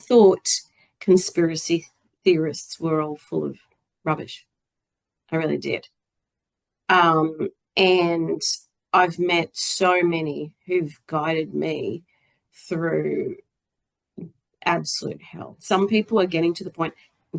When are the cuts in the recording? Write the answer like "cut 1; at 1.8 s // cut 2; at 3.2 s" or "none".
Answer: cut 1; at 15.5 s